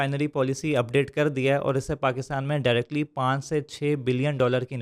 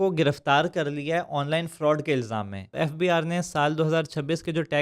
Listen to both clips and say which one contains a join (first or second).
second